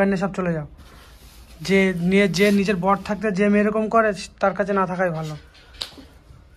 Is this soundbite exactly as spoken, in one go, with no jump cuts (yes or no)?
yes